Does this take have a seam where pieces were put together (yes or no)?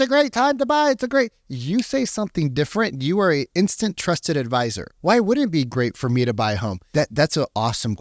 no